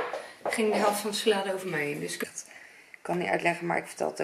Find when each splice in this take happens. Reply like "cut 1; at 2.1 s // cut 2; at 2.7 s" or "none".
cut 1; at 2.2 s